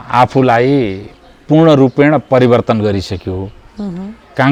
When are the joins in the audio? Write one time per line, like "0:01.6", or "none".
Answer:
none